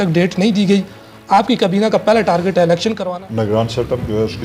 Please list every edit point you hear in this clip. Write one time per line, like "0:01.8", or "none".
0:03.0